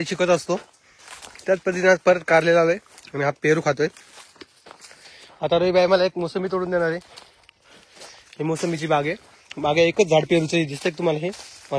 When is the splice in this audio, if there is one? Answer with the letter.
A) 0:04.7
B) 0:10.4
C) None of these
C